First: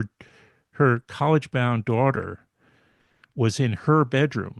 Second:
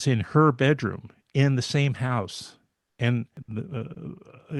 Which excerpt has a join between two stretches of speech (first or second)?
second